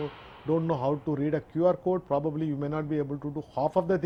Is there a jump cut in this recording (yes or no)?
no